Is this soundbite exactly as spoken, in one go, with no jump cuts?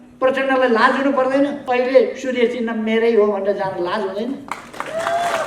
no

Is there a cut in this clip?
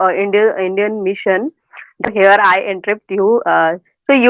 yes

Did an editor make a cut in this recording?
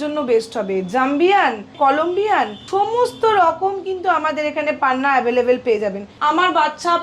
yes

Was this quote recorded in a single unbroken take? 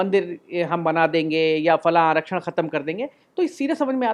yes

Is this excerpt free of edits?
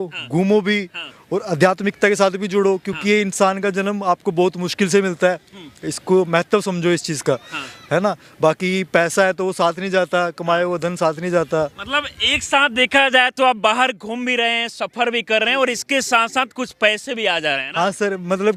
yes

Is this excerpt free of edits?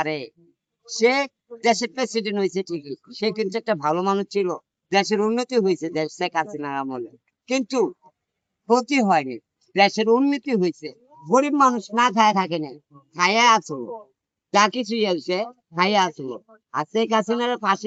yes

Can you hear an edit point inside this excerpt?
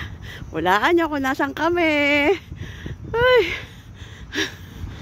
no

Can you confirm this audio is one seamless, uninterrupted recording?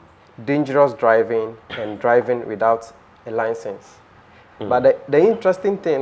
yes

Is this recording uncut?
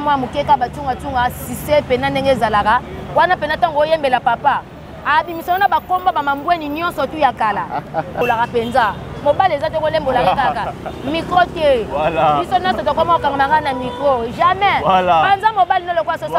no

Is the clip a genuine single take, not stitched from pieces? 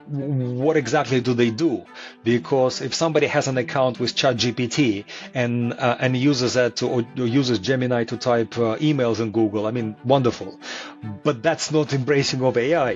yes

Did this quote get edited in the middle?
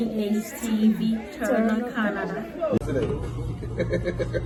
no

